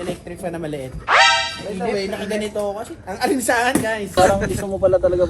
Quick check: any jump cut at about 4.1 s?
yes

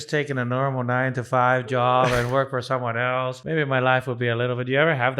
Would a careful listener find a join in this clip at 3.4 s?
yes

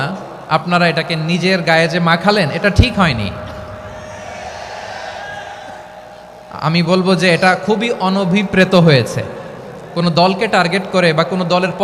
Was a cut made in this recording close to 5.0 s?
no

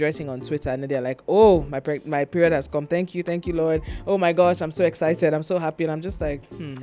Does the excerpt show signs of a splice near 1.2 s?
no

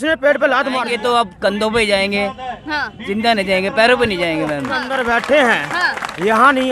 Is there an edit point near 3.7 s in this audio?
no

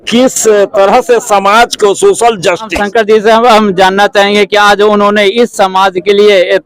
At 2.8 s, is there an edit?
yes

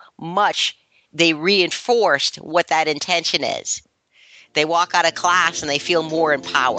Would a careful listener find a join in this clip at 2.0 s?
no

